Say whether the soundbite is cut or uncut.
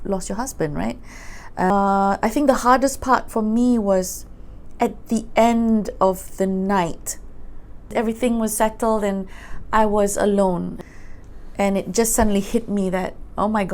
cut